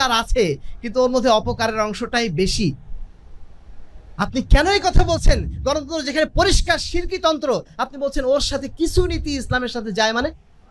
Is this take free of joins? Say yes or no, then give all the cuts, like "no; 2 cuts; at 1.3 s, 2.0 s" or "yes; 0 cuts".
yes; 0 cuts